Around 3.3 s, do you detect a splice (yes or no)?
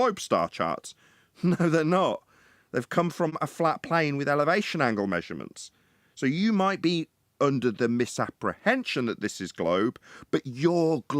yes